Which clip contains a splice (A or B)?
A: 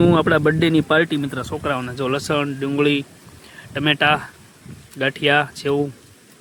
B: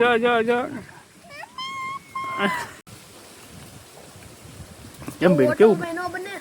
B